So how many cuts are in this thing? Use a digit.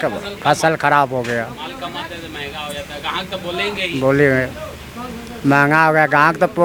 0